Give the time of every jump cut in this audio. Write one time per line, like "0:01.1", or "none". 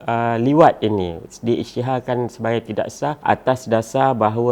0:03.2